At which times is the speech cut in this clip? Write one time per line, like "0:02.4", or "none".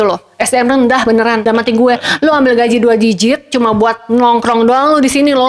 none